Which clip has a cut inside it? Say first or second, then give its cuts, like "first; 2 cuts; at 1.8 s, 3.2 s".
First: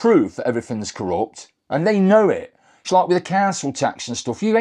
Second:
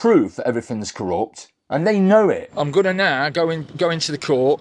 second; 1 cut; at 2.5 s